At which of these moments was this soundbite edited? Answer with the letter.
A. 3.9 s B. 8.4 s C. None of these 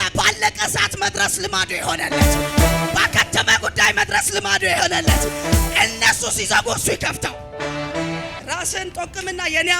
B